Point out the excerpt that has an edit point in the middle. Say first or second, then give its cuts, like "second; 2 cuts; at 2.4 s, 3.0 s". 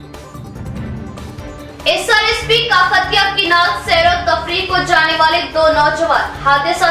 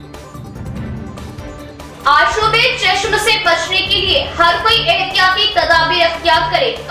second; 1 cut; at 1.7 s